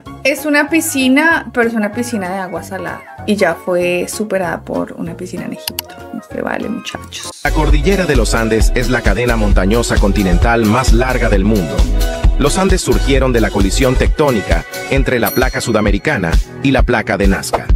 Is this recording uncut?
yes; 0 cuts

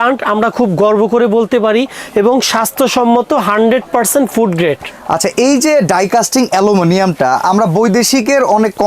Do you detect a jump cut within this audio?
no; 0 cuts

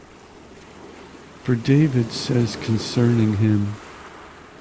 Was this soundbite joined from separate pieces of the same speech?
yes; 1 cut; at 1.0 s

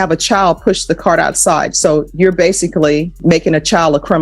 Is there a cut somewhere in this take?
yes; 1 cut; at 3.2 s

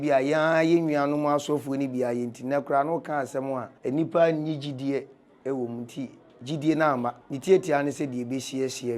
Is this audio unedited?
no; 2 cuts; at 3.7 s, 7.3 s

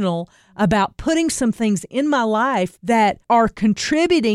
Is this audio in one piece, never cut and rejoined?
no; 1 cut; at 3.0 s

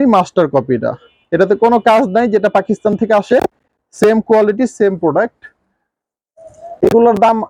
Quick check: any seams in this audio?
no; 0 cuts

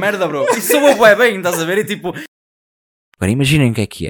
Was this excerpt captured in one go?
no; 1 cut; at 2.4 s

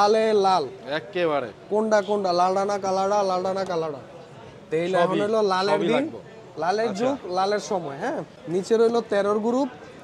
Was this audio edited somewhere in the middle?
no; 0 cuts

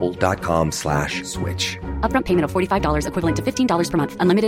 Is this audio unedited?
yes; 0 cuts

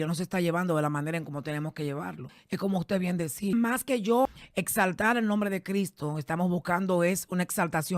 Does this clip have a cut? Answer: yes; 3 cuts; at 2.3 s, 3.5 s, 4.4 s

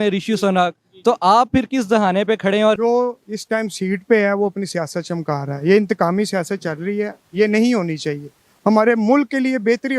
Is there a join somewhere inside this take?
yes; 1 cut; at 2.8 s

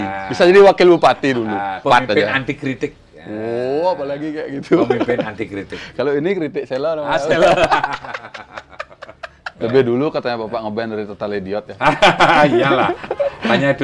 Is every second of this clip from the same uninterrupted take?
no; 2 cuts; at 1.7 s, 9.4 s

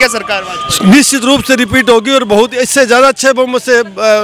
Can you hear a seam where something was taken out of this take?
no; 0 cuts

